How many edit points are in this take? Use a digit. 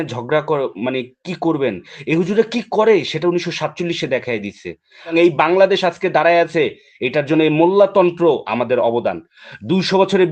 1